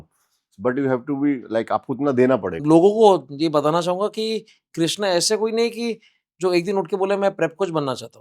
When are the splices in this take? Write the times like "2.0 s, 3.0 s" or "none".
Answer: 2.5 s